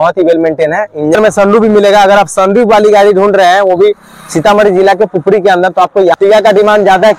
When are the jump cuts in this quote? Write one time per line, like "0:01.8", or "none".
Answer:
0:01.2
0:06.2

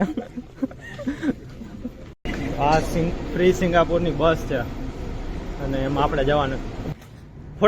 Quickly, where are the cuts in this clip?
0:02.2
0:06.8

